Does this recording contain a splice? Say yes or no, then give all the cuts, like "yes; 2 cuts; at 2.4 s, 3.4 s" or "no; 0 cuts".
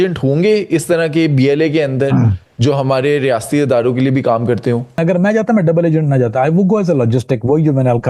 yes; 1 cut; at 5.0 s